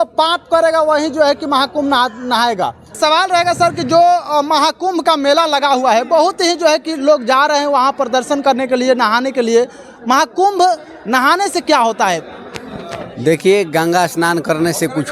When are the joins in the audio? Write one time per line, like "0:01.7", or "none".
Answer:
0:03.0